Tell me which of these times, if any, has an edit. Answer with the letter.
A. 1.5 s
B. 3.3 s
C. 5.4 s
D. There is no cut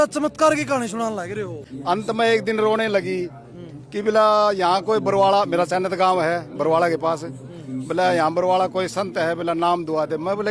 A